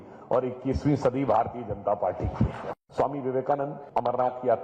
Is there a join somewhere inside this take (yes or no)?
yes